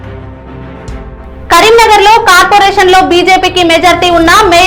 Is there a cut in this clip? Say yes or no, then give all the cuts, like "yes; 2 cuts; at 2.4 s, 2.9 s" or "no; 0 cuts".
no; 0 cuts